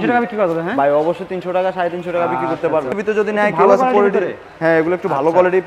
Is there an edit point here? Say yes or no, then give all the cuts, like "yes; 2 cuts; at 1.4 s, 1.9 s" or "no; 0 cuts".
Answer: yes; 1 cut; at 3.0 s